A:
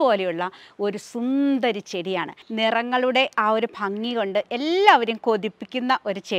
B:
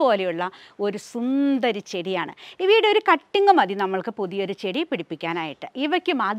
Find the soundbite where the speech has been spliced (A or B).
A